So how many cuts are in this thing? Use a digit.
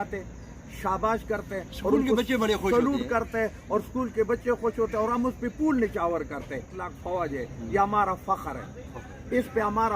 1